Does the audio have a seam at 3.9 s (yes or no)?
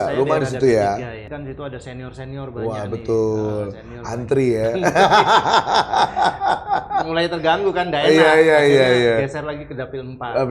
no